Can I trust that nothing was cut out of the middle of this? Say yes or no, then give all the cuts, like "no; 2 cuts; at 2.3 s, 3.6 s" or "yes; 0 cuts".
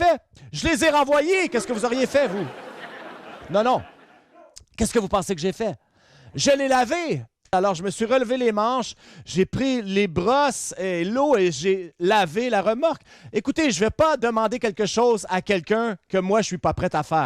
no; 1 cut; at 7.5 s